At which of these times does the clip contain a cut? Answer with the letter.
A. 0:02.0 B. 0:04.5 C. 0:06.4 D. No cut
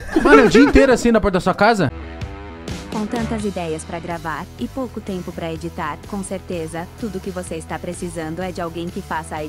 A